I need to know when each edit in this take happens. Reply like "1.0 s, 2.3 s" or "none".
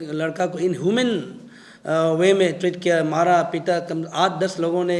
none